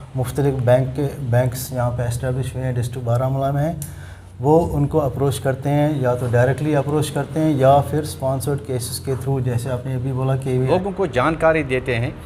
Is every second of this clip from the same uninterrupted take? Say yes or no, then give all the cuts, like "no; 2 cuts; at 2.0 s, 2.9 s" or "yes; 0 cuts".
no; 1 cut; at 10.7 s